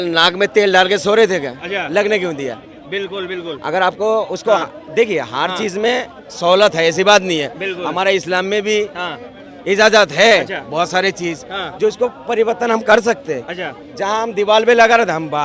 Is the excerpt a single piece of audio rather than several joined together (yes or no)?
yes